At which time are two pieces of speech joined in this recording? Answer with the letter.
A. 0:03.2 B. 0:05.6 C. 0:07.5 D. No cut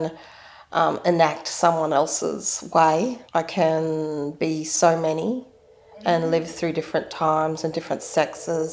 A